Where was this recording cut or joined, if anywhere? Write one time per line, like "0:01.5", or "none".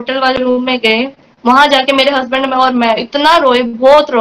0:01.2